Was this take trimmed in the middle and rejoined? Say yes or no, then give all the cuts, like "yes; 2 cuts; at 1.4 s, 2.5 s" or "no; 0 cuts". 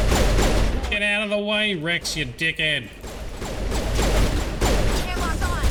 no; 0 cuts